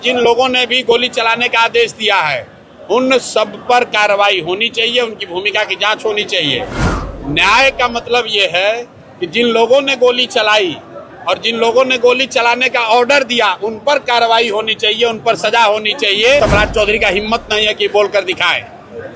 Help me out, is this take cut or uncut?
cut